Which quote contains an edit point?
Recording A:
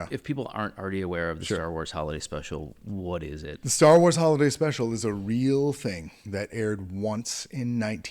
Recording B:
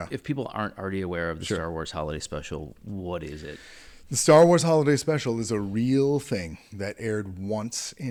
A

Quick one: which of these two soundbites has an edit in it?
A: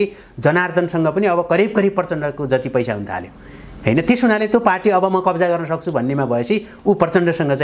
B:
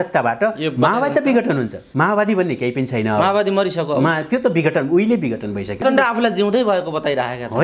B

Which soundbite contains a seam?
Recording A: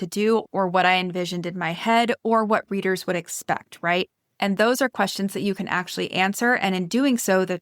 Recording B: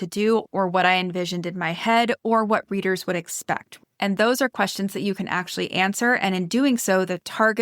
B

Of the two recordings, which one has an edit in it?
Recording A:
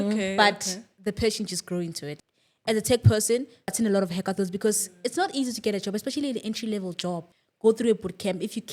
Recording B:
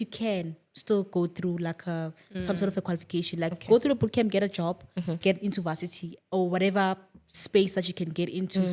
A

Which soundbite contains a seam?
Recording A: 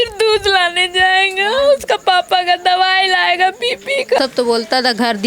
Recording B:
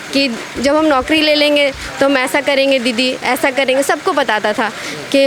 A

